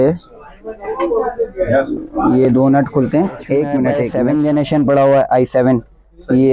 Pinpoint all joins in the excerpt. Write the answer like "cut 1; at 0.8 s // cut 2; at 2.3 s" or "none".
cut 1; at 4.1 s